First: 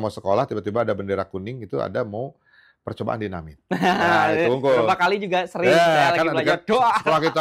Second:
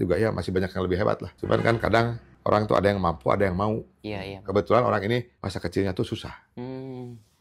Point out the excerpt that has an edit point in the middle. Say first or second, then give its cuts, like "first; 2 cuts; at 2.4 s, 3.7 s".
second; 3 cuts; at 1.3 s, 2.3 s, 5.4 s